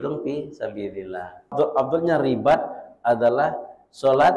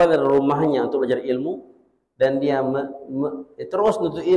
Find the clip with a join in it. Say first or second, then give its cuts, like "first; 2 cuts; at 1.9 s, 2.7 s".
first; 1 cut; at 1.5 s